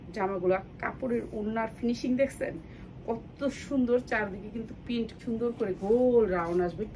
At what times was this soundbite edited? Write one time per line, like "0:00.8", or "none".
0:05.1